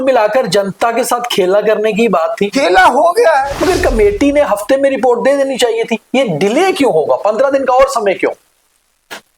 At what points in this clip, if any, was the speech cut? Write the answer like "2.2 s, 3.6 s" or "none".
2.5 s, 3.5 s